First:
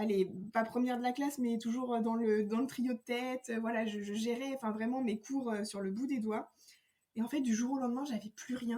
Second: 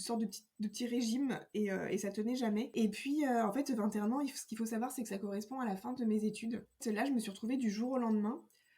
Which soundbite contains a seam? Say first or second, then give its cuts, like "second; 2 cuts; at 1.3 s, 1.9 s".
second; 2 cuts; at 2.7 s, 6.8 s